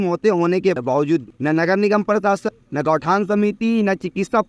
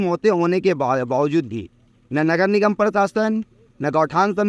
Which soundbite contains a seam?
first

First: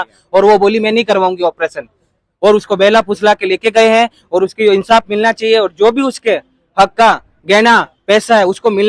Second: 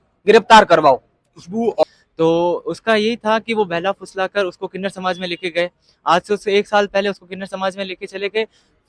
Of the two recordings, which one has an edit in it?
second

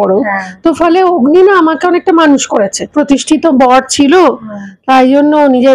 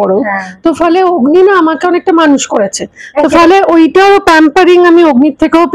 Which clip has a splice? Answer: first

